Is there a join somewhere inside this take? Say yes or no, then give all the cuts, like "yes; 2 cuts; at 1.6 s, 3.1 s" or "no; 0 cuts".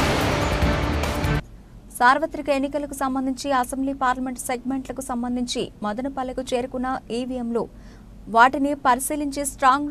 yes; 1 cut; at 1.4 s